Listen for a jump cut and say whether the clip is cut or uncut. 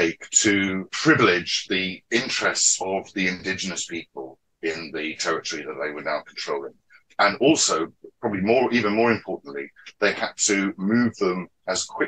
cut